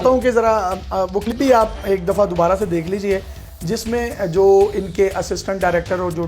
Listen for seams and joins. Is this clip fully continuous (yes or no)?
no